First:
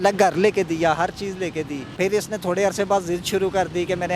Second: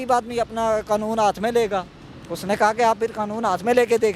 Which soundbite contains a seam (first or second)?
first